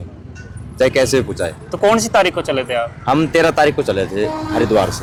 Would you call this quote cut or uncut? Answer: uncut